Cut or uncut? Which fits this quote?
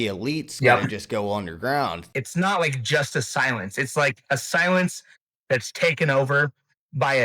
cut